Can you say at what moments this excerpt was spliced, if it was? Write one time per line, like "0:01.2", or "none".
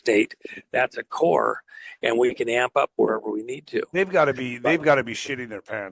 none